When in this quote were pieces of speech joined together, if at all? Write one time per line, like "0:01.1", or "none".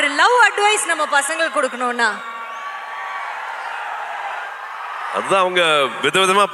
none